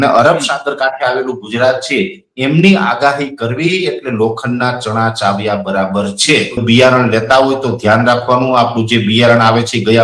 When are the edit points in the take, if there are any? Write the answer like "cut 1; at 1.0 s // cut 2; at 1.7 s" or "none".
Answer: cut 1; at 6.6 s